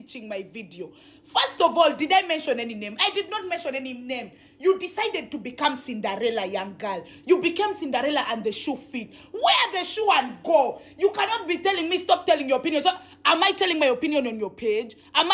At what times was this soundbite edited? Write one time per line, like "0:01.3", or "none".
none